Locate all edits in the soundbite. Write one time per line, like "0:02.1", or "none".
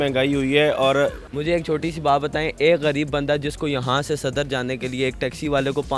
0:01.3